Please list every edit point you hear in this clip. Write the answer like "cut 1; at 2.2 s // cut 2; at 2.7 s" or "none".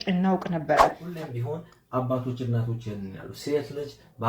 cut 1; at 1.0 s